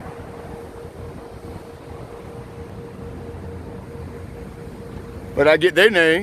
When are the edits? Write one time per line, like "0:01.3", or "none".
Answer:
0:02.7